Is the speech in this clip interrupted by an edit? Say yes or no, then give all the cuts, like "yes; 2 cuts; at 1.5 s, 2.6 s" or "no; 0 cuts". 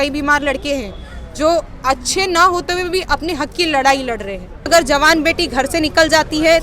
yes; 1 cut; at 4.7 s